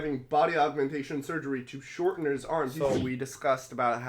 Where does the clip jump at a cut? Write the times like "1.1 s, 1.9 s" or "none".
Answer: 3.0 s